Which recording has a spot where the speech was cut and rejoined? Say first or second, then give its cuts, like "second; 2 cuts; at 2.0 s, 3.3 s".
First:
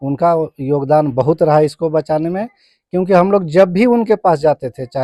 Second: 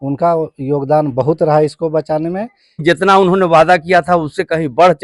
second; 1 cut; at 2.8 s